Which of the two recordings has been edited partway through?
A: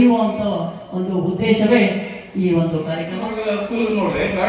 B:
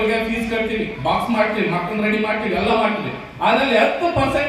A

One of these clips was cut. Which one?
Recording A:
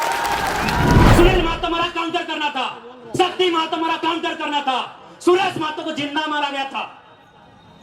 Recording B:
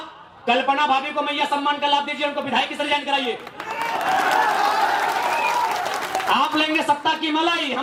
A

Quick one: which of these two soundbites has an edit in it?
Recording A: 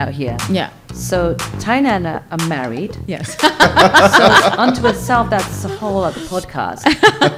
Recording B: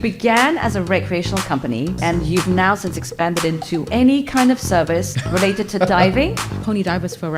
B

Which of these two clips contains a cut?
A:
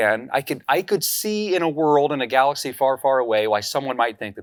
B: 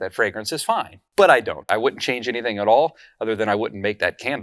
B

